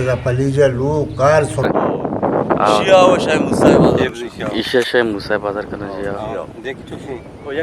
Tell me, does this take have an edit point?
yes; 1 cut; at 1.7 s

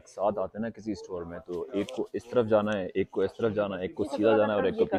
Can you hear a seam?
no; 0 cuts

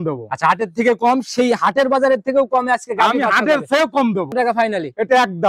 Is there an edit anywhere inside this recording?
yes; 1 cut; at 4.4 s

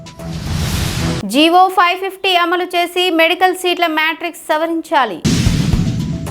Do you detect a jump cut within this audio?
no; 0 cuts

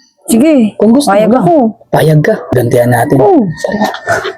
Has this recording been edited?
yes; 1 cut; at 2.4 s

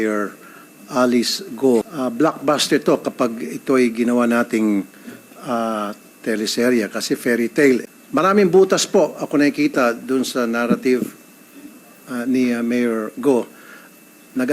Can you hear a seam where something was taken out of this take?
yes; 2 cuts; at 1.9 s, 7.9 s

